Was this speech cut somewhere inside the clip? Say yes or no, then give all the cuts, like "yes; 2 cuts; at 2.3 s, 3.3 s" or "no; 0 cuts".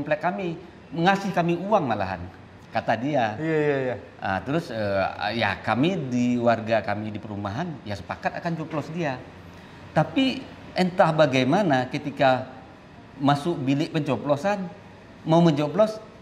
no; 0 cuts